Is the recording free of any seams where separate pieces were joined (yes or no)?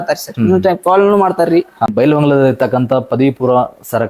no